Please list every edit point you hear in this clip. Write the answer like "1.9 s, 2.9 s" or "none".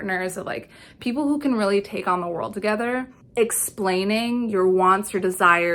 none